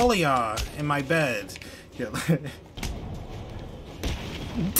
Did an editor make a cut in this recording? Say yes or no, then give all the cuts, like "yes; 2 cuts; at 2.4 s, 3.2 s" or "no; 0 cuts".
yes; 1 cut; at 2.7 s